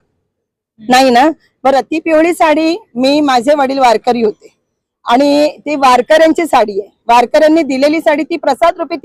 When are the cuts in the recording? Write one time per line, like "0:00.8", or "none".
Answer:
none